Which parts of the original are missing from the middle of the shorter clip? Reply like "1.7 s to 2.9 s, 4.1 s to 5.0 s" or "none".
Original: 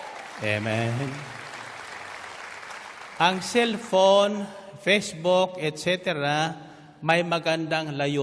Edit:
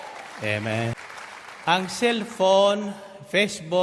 0.9 s to 2.5 s